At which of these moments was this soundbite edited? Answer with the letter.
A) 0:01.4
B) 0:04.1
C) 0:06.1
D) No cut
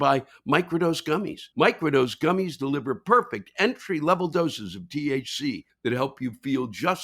A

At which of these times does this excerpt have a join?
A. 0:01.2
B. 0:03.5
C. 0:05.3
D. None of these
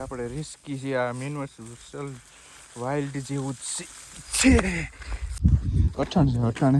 C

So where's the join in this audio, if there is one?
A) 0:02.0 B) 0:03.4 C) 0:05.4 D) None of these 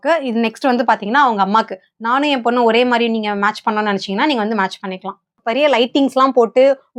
C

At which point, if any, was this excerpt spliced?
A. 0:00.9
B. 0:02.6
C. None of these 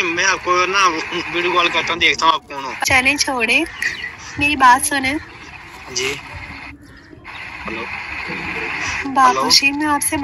B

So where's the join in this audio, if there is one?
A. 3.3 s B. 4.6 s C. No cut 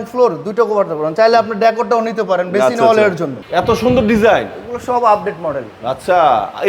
A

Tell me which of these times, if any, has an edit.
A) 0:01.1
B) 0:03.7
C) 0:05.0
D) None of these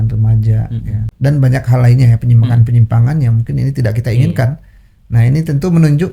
A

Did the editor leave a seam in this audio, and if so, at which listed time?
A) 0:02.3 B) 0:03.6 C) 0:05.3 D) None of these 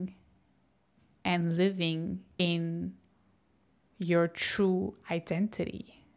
A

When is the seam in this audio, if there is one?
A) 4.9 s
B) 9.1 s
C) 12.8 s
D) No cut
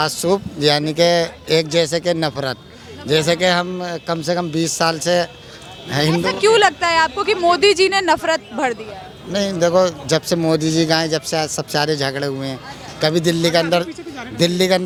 D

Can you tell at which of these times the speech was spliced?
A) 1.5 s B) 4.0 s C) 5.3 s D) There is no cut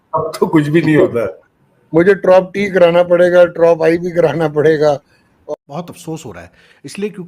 C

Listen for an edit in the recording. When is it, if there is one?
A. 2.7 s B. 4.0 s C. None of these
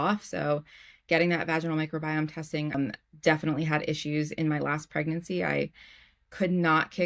A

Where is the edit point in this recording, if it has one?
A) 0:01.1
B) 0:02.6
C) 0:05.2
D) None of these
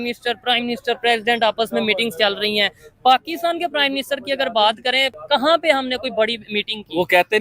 C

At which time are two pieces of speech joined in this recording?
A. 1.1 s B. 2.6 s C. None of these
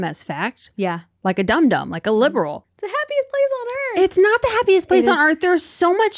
B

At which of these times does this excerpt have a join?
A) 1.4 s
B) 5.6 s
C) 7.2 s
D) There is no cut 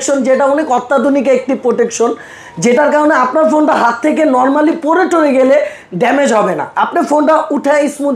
D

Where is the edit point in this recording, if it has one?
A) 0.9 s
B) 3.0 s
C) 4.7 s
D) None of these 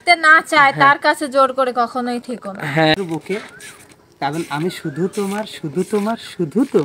B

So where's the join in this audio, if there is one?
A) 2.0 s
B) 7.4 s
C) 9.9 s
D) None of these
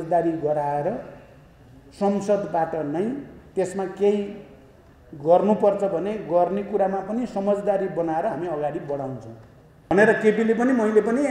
C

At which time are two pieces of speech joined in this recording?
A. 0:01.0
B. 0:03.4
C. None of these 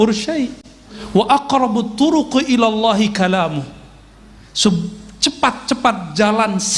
A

